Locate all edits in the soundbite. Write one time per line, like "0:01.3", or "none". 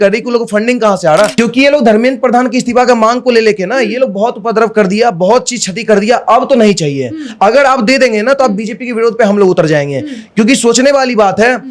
0:01.3